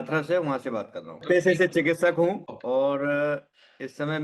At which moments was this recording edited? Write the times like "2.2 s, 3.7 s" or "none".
1.2 s, 2.4 s